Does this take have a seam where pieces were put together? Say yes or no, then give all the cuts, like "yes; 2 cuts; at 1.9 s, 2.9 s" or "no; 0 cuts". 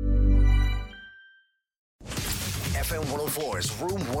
yes; 1 cut; at 1.8 s